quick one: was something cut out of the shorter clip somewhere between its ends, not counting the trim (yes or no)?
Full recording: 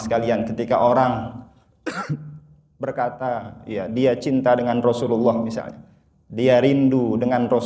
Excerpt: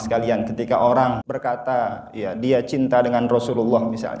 yes